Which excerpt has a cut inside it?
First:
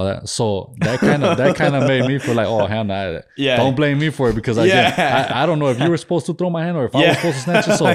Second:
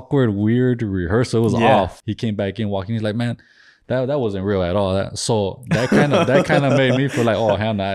second; 1 cut; at 2.0 s

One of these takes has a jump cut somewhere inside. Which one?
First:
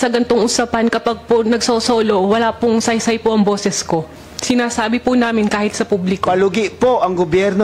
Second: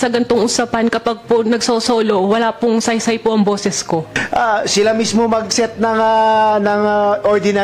second; 1 cut; at 4.2 s

